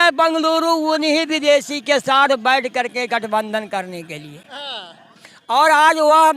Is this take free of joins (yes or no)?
yes